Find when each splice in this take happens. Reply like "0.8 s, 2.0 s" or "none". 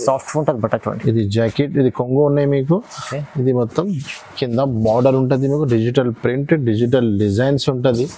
none